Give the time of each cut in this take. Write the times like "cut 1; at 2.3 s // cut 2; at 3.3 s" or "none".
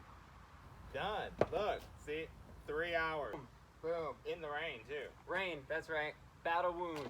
cut 1; at 3.5 s